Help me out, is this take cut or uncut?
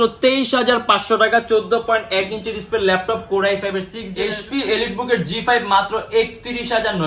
cut